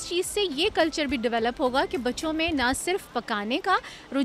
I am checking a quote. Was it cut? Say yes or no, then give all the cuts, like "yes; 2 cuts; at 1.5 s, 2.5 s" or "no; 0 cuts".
no; 0 cuts